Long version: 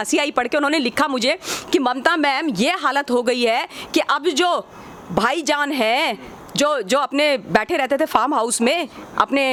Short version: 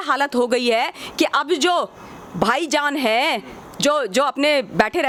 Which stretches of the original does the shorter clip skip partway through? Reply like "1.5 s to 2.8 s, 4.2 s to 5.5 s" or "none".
none